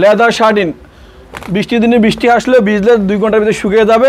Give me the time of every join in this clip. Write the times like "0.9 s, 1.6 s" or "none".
none